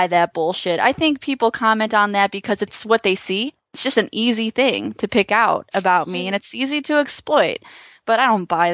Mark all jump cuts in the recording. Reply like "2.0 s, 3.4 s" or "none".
2.8 s, 3.8 s